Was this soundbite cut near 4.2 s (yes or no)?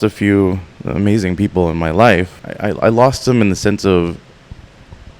no